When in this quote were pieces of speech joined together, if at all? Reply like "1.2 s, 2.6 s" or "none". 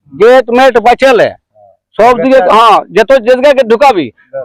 none